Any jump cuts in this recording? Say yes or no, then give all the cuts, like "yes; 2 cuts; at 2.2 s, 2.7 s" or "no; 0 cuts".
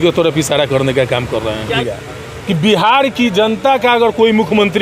yes; 1 cut; at 1.7 s